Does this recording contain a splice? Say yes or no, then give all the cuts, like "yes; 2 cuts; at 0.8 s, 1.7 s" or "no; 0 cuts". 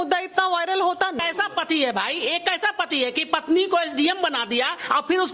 yes; 1 cut; at 1.2 s